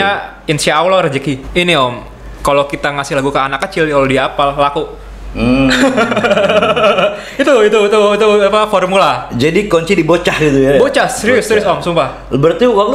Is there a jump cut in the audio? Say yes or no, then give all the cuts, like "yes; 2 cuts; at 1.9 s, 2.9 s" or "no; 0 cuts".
yes; 1 cut; at 1.4 s